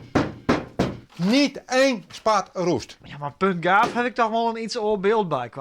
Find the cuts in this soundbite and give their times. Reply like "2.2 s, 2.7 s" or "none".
1.0 s

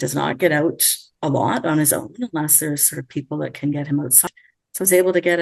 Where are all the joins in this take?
4.2 s

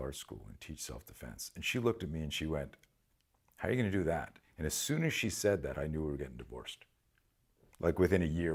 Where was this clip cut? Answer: none

